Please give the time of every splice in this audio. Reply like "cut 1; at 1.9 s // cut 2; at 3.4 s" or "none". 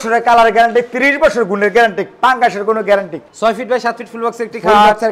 cut 1; at 3.2 s